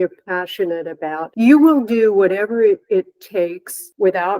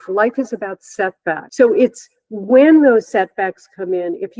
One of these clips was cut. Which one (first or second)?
second